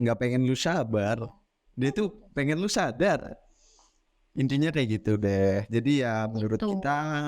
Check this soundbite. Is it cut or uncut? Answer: uncut